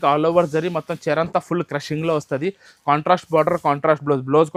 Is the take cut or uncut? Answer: uncut